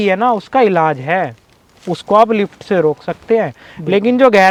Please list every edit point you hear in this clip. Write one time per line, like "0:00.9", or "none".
none